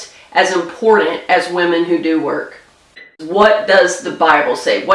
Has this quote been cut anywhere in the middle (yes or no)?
yes